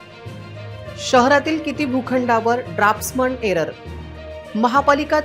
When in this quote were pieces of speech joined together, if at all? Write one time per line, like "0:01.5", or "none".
0:01.1